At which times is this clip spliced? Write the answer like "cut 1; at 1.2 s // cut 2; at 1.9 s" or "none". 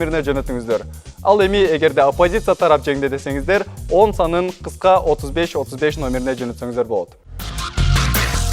cut 1; at 7.2 s